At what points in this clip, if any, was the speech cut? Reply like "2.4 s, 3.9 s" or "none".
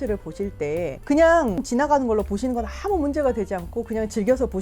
1.0 s, 1.6 s